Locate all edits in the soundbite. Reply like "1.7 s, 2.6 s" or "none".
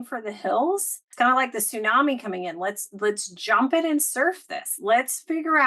1.0 s